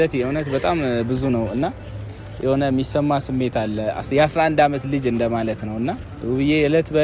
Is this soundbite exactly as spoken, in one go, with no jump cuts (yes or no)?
no